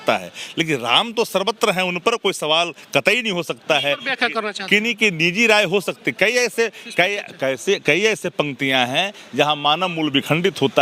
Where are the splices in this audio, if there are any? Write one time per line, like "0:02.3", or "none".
none